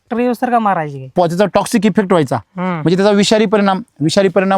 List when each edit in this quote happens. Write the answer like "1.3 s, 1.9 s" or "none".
1.1 s